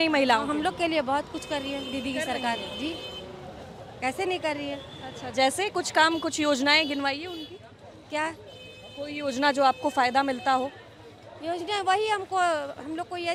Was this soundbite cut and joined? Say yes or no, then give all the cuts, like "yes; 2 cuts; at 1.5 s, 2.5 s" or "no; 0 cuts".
no; 0 cuts